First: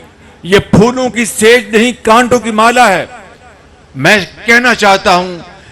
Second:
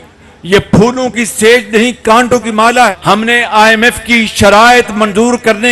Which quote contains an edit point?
second; 1 cut; at 3.0 s

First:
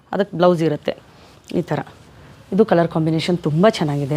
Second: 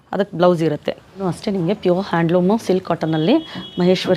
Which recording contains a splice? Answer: second; 1 cut; at 1.2 s

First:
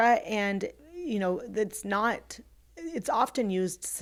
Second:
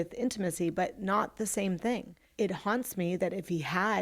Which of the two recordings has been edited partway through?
second; 1 cut; at 2.2 s

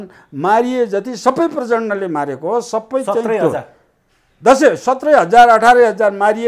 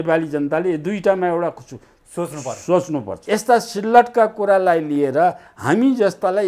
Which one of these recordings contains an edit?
second; 1 cut; at 3.1 s

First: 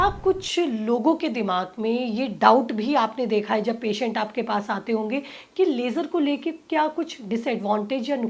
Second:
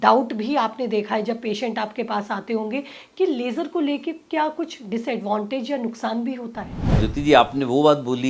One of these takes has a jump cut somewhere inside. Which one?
second; 1 cut; at 7.0 s

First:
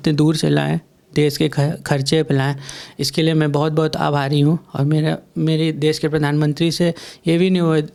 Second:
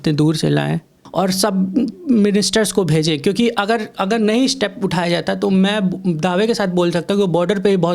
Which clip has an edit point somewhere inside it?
second; 1 cut; at 1.0 s

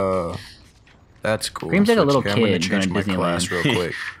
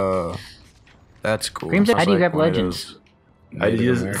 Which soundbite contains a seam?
second; 1 cut; at 1.9 s

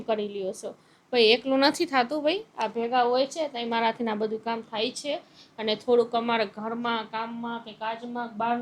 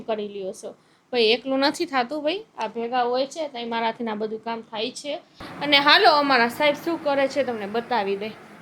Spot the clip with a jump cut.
second; 1 cut; at 5.5 s

